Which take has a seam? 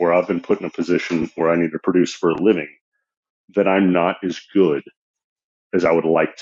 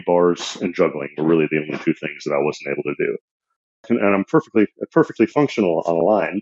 second; 1 cut; at 3.9 s

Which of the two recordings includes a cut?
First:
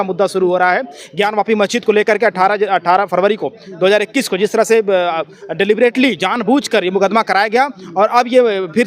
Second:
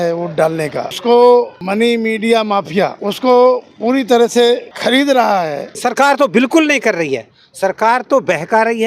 second; 5 cuts; at 0.9 s, 1.6 s, 3.0 s, 4.7 s, 5.7 s

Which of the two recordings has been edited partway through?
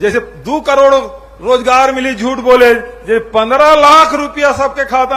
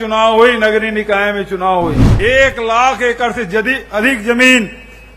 second; 1 cut; at 2.0 s

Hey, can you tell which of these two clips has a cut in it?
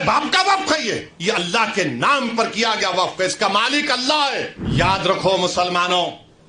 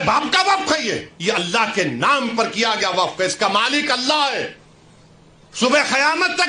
first; 1 cut; at 4.6 s

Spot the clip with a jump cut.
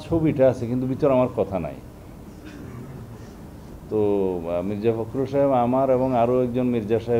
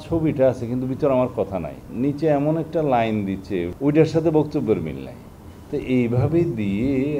second; 2 cuts; at 1.9 s, 3.7 s

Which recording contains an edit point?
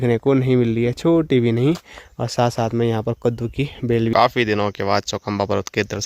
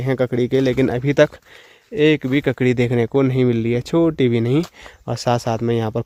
first; 1 cut; at 4.1 s

